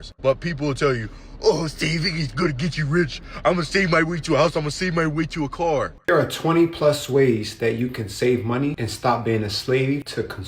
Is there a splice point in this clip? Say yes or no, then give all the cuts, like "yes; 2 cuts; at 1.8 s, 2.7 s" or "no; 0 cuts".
yes; 1 cut; at 5.9 s